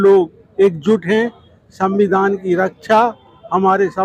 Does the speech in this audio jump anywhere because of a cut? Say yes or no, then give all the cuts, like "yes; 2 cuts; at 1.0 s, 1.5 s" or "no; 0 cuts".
no; 0 cuts